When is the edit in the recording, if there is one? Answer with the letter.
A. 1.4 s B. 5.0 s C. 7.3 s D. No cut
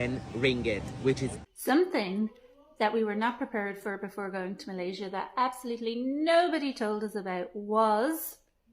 A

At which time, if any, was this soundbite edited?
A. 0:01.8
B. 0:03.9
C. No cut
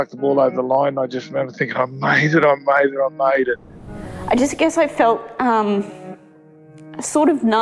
B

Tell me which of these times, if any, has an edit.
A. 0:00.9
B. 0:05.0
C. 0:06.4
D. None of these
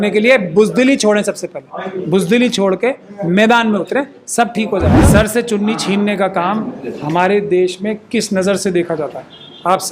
B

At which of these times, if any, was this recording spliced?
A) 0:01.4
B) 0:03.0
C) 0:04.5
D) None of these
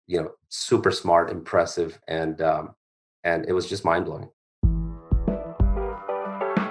C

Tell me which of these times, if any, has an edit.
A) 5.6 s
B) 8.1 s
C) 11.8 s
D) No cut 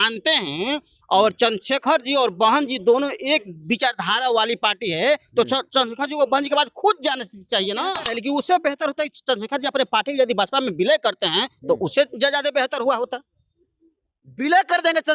B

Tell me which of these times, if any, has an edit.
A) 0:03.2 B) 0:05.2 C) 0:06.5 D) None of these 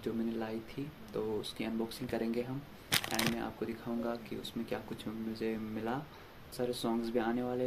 C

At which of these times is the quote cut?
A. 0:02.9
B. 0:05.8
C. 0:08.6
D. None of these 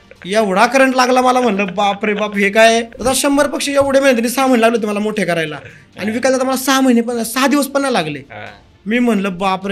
A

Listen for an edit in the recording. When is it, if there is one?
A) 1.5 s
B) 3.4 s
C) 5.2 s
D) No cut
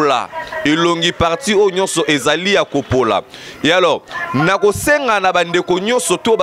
D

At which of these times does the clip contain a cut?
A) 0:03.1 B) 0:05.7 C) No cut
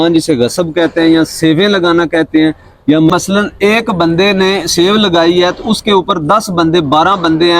A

